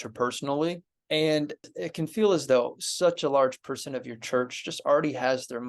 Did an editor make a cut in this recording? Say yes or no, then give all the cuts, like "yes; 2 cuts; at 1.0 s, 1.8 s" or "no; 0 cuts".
yes; 2 cuts; at 0.9 s, 1.7 s